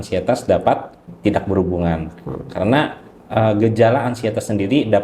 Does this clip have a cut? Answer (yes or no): yes